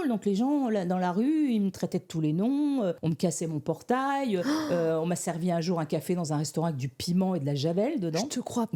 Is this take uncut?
yes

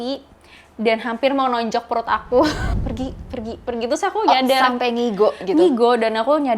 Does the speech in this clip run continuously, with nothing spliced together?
no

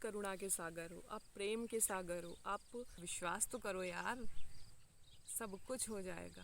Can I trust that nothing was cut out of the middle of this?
no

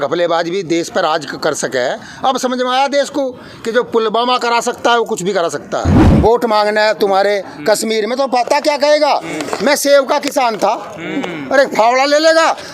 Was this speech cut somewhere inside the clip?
yes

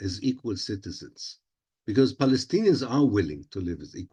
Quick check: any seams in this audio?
no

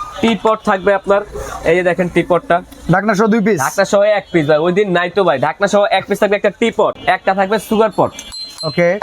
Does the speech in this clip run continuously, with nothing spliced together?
no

